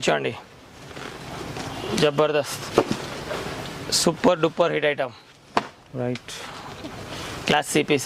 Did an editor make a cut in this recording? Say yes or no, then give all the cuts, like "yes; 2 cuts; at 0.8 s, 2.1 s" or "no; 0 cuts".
no; 0 cuts